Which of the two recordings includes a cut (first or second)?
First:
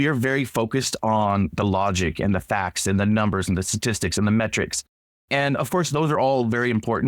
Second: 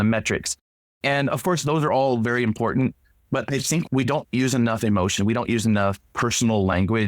second